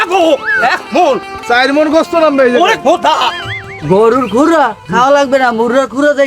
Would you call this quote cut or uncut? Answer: cut